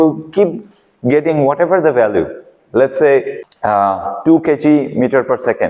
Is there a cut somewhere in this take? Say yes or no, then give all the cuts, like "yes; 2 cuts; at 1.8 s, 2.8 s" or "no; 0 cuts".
yes; 1 cut; at 3.4 s